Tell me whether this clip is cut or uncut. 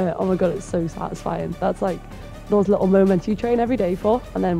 uncut